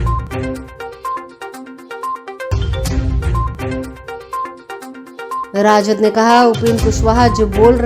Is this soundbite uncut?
no; 3 cuts; at 1.7 s, 2.5 s, 4.9 s

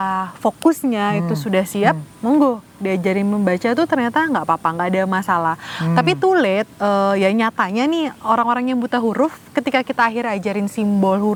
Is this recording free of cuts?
yes; 0 cuts

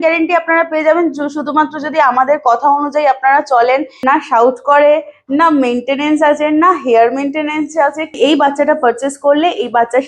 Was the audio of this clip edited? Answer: yes; 2 cuts; at 3.9 s, 8.2 s

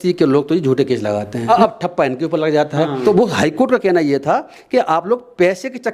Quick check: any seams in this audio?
yes; 2 cuts; at 1.4 s, 3.0 s

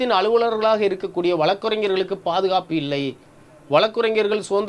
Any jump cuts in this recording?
no; 0 cuts

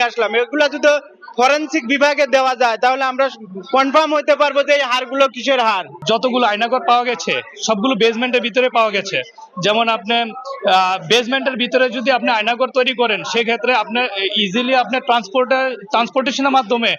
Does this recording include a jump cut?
yes; 1 cut; at 5.9 s

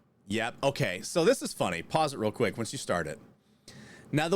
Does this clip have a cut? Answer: no; 0 cuts

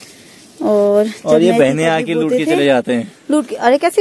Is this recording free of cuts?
no; 1 cut; at 3.1 s

